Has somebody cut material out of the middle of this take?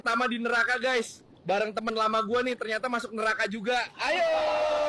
no; 0 cuts

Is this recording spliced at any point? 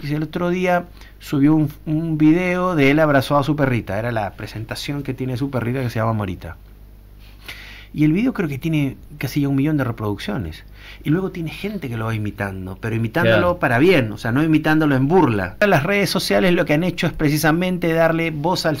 yes; 1 cut; at 15.6 s

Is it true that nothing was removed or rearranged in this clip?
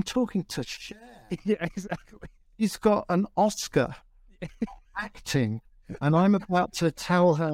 yes; 0 cuts

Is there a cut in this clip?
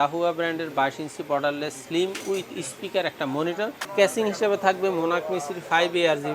yes; 1 cut; at 3.8 s

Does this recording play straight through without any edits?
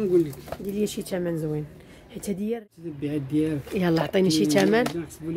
no; 1 cut; at 2.8 s

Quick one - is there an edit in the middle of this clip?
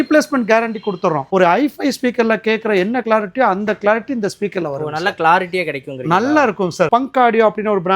yes; 2 cuts; at 1.2 s, 6.9 s

